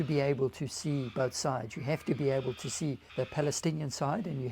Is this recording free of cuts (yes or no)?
no